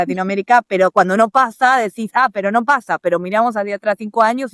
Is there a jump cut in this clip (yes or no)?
no